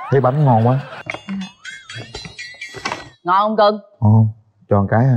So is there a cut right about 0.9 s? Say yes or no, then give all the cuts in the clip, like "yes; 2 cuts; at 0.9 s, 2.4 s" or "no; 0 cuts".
yes; 1 cut; at 0.9 s